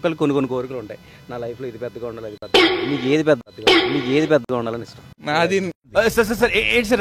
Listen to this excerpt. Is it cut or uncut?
uncut